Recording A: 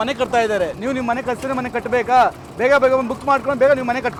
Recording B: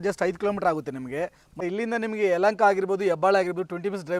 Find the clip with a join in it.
B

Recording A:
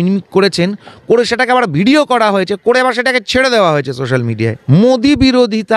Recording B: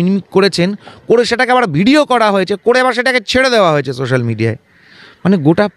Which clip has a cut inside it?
A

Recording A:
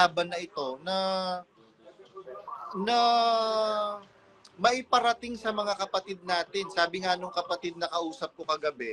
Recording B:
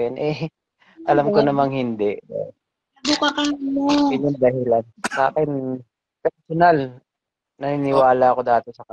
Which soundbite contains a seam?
B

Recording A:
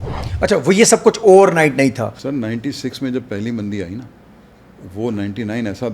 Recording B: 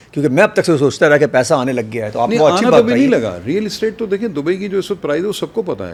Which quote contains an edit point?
A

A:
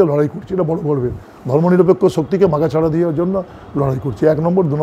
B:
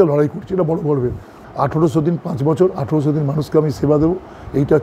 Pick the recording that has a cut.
B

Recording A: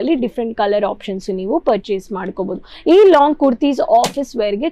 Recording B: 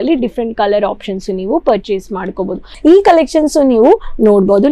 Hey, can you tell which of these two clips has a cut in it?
B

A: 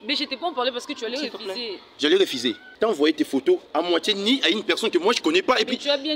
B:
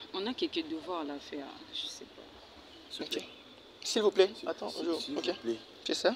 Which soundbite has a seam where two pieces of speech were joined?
A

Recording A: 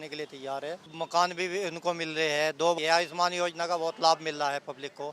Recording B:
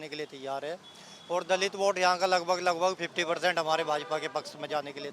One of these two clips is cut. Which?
A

